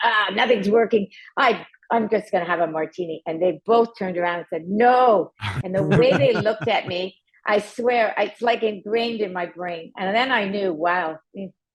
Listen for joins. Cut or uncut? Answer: uncut